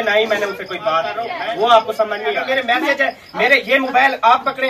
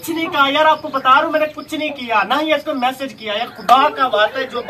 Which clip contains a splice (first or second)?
first